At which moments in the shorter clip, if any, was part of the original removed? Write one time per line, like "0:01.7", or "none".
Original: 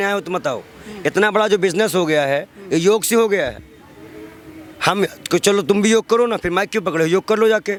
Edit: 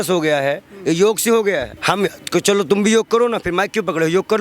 0:01.7